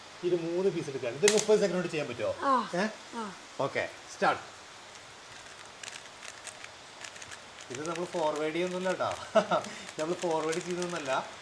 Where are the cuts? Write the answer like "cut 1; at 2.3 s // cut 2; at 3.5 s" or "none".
none